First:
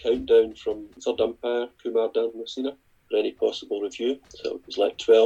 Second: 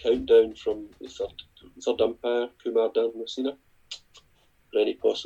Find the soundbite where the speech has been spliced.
first; 3 cuts; at 0.9 s, 2.9 s, 4.3 s

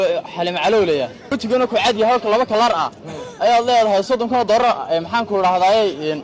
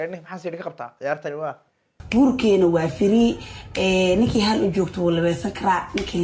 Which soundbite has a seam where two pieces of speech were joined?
second; 1 cut; at 1.9 s

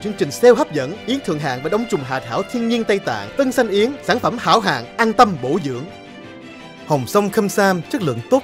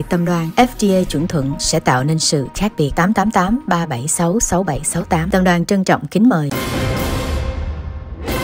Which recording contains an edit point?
second; 1 cut; at 6.5 s

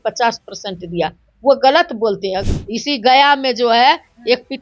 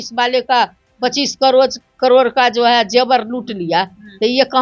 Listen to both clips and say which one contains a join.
first; 1 cut; at 2.5 s

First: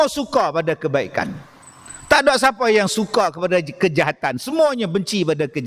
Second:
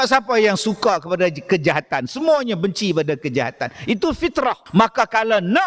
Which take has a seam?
second; 1 cut; at 4.6 s

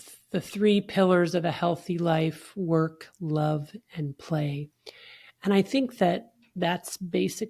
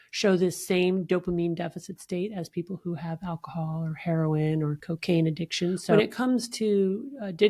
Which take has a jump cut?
second; 2 cuts; at 4.9 s, 5.9 s

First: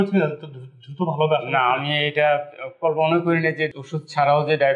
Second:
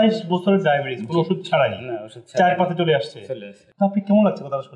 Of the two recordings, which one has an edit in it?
first; 1 cut; at 3.7 s

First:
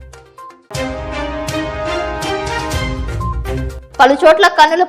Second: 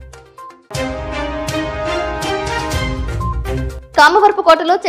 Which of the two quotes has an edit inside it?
first; 1 cut; at 3.7 s

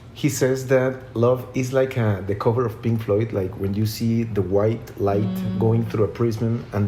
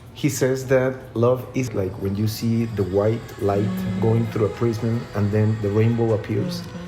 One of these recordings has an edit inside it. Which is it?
second; 1 cut; at 1.7 s

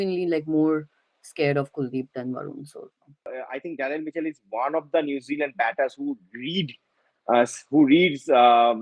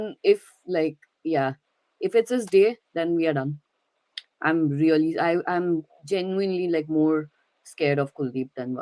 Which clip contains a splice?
first; 1 cut; at 3.4 s

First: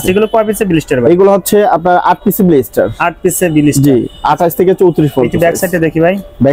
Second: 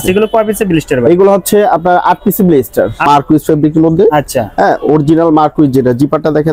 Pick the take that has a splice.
second; 1 cut; at 3.1 s

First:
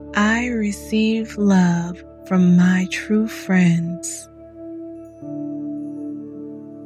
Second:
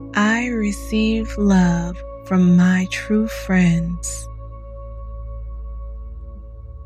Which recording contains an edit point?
second; 1 cut; at 4.0 s

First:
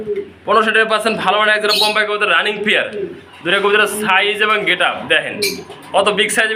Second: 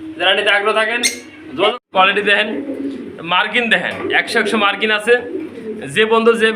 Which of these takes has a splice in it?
second; 1 cut; at 1.8 s

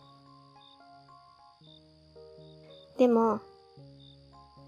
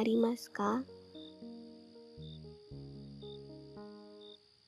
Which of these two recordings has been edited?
second; 2 cuts; at 0.9 s, 2.4 s

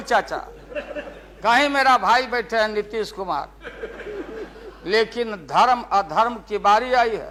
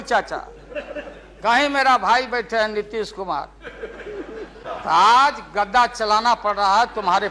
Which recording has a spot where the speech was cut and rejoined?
second; 1 cut; at 4.6 s

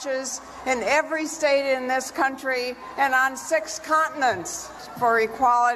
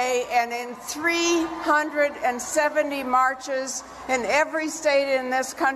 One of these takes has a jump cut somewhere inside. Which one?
first; 1 cut; at 4.8 s

